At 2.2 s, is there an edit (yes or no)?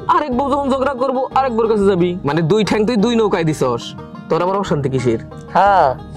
yes